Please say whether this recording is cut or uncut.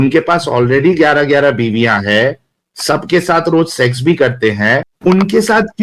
uncut